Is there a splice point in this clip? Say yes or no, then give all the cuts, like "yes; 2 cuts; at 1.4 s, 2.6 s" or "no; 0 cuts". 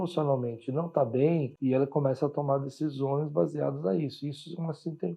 yes; 1 cut; at 1.5 s